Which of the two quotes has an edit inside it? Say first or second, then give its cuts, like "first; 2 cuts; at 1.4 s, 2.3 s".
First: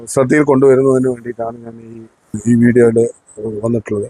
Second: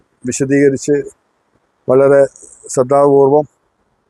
first; 1 cut; at 2.4 s